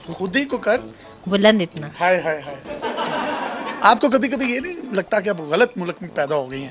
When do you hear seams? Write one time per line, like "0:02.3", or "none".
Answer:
0:02.6
0:03.7